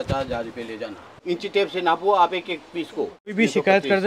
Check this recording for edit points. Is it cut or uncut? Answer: cut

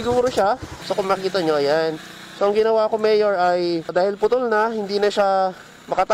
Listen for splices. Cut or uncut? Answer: cut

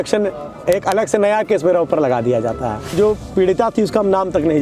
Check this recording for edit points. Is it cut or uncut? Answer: cut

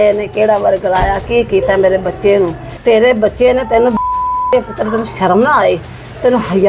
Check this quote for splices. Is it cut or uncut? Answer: cut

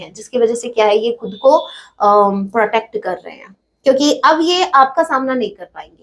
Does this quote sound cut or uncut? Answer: uncut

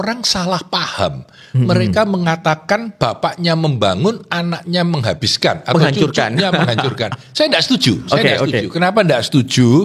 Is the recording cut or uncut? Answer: uncut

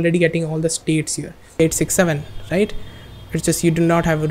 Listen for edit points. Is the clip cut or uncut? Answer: cut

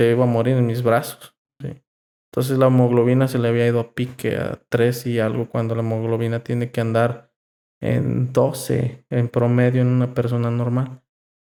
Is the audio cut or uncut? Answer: uncut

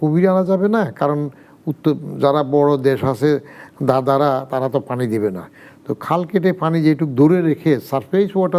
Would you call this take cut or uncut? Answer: uncut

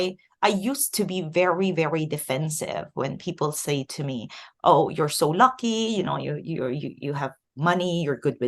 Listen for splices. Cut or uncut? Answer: uncut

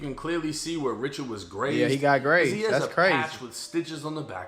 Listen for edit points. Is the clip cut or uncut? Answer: uncut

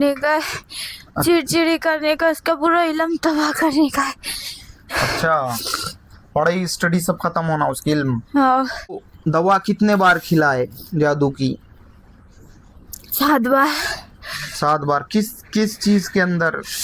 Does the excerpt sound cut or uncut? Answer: cut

